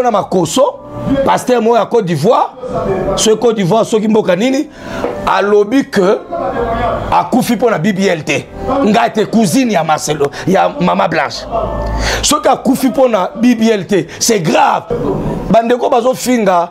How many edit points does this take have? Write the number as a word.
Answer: one